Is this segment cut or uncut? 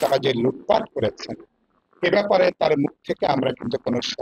uncut